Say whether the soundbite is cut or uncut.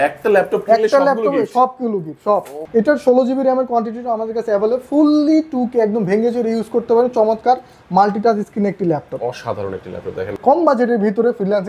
cut